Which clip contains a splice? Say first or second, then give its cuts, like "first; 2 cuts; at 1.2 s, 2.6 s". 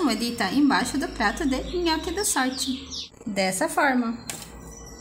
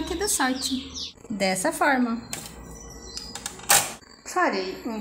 second; 1 cut; at 4.0 s